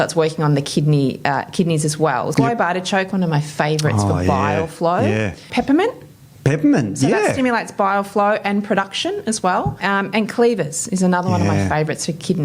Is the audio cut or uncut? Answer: cut